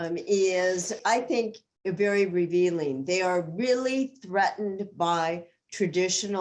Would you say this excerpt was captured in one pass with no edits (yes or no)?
no